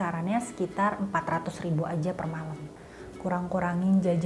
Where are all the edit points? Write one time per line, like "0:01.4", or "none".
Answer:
0:02.8